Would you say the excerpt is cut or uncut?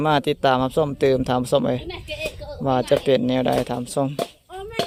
uncut